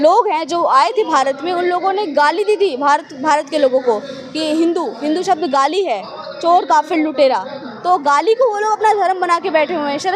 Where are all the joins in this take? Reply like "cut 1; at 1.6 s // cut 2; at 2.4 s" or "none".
none